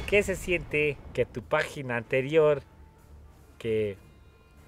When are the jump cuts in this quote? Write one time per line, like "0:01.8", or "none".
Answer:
0:01.0